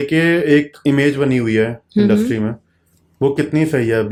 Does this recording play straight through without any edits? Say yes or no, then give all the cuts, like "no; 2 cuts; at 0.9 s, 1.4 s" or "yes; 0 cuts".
yes; 0 cuts